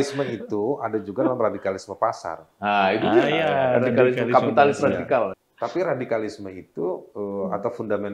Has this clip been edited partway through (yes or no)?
yes